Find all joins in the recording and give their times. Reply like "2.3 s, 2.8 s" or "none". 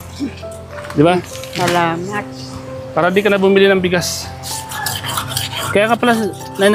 4.7 s